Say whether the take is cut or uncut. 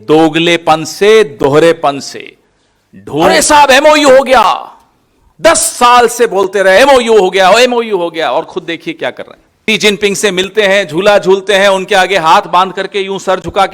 cut